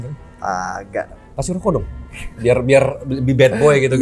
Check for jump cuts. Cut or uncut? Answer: cut